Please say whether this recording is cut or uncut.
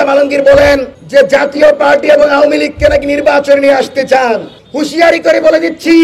cut